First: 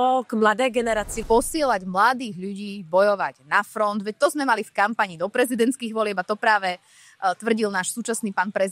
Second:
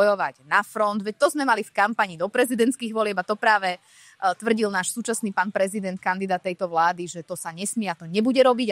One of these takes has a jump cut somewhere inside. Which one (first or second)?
first